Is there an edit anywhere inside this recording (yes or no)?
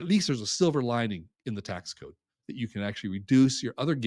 no